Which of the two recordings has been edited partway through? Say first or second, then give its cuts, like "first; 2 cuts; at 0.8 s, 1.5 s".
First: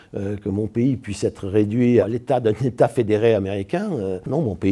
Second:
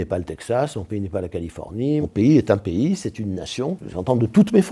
second; 2 cuts; at 2.0 s, 3.9 s